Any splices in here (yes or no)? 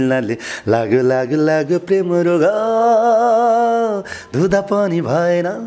no